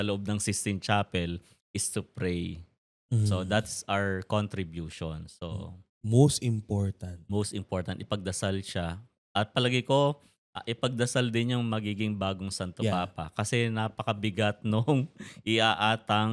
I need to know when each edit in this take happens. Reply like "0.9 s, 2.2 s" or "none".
none